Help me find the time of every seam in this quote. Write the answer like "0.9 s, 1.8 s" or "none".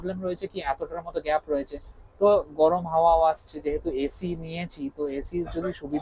none